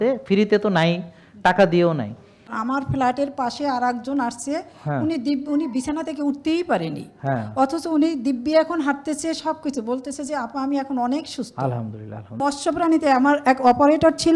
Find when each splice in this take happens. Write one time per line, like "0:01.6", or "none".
0:02.6
0:12.4

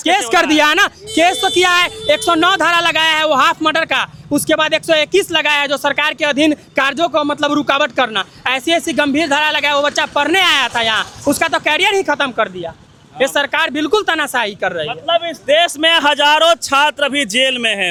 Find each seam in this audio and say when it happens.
none

